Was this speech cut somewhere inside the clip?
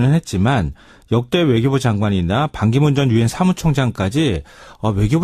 no; 0 cuts

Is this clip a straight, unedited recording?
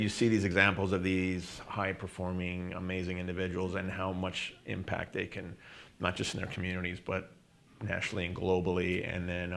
yes; 0 cuts

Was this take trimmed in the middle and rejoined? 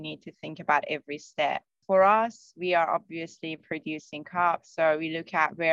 yes; 1 cut; at 1.8 s

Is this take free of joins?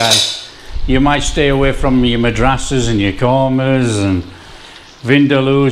yes; 0 cuts

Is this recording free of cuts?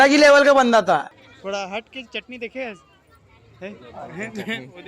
no; 1 cut; at 1.0 s

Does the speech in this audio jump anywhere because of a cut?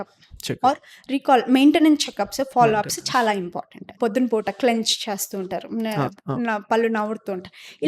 yes; 1 cut; at 3.9 s

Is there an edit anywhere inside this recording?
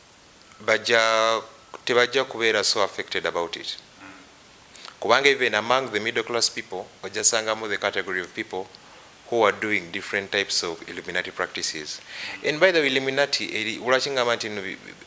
no; 0 cuts

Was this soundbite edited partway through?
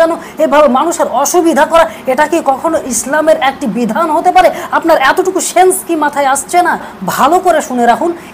yes; 1 cut; at 7.0 s

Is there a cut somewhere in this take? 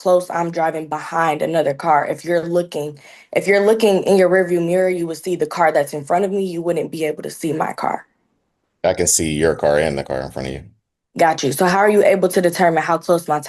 no; 0 cuts

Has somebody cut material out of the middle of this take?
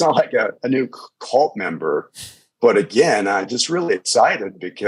no; 0 cuts

